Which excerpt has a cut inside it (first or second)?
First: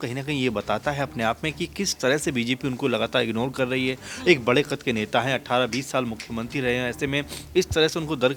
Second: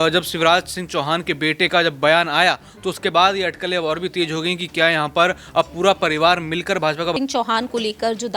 second